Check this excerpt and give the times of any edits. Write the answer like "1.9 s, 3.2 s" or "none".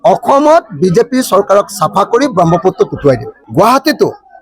3.4 s